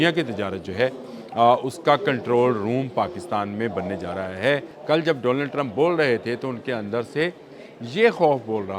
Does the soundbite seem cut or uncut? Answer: cut